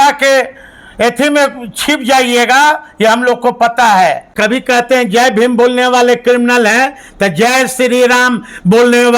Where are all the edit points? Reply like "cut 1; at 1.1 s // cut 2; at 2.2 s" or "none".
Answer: cut 1; at 4.3 s